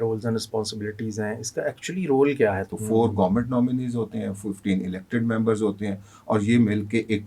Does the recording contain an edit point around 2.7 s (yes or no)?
yes